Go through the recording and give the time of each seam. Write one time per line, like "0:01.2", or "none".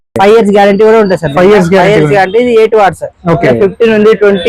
none